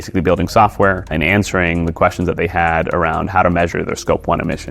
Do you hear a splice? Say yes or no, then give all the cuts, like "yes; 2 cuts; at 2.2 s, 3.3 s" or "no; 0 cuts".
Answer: no; 0 cuts